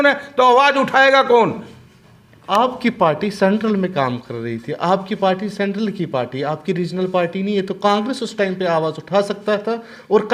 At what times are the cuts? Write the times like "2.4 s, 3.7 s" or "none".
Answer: none